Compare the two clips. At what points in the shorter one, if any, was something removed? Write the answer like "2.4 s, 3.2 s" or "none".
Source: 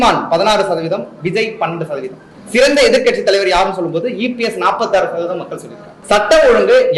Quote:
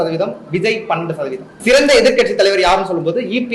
1.5 s